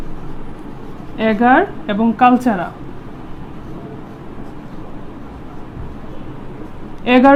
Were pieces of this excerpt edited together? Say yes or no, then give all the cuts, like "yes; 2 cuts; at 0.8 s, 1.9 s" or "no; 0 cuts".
no; 0 cuts